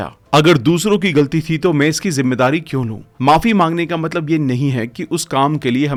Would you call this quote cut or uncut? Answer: uncut